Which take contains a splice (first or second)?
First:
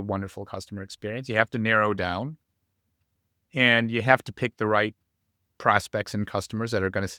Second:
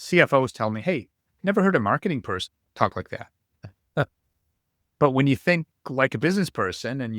second